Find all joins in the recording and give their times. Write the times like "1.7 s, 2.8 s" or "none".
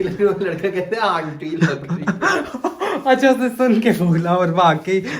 none